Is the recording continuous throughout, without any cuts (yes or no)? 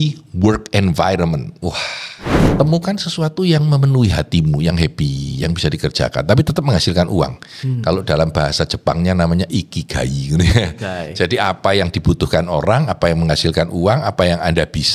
no